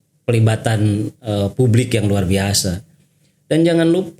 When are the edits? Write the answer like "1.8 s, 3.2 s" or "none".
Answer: none